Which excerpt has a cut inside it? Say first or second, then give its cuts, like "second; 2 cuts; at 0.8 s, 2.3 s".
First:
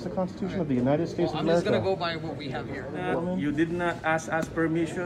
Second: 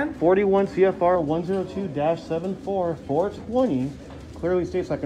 first; 1 cut; at 3.0 s